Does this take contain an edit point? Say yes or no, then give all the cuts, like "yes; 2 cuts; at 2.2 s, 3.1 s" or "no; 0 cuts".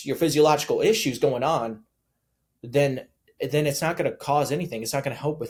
no; 0 cuts